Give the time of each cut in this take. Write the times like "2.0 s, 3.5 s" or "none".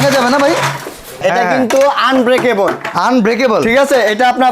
1.2 s